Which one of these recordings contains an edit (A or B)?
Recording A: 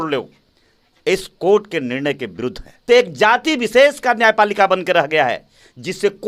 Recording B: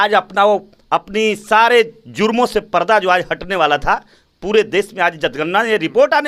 A